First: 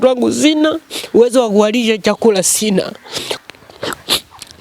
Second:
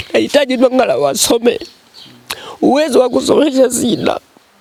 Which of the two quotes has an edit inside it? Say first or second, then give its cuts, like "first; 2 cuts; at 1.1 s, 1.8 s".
first; 1 cut; at 3.3 s